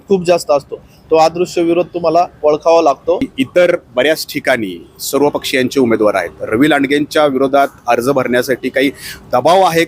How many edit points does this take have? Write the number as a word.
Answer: one